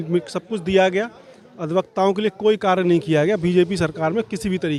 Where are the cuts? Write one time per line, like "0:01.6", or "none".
none